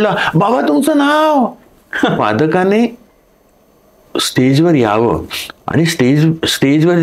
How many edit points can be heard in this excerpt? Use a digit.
1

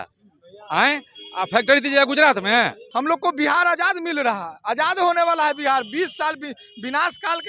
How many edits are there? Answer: 1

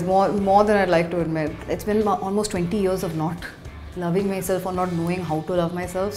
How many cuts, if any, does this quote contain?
1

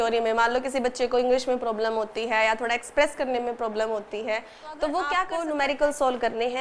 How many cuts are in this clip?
1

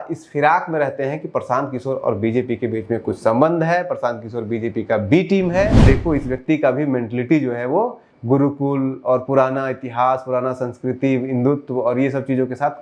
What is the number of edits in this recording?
1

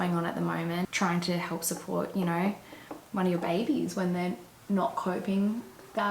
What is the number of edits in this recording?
1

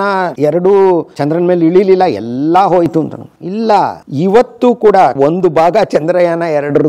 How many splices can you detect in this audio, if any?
2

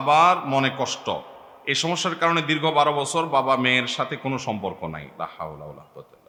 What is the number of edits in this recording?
0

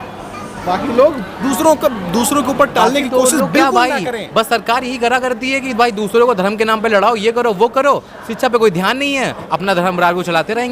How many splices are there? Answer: 1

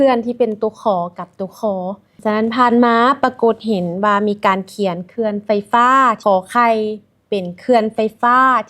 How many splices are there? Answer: 2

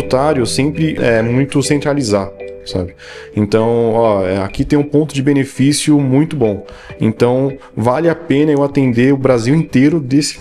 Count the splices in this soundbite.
1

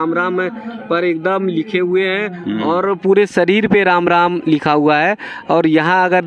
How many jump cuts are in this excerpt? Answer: 0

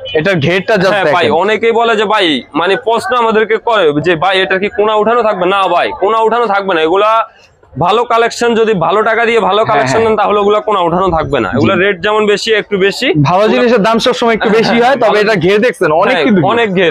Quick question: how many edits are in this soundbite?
0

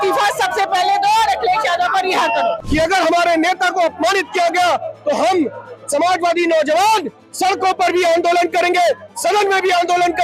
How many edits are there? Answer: 1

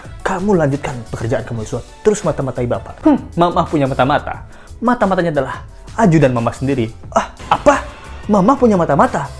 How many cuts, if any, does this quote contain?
1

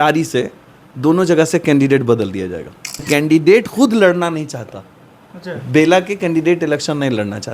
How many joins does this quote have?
1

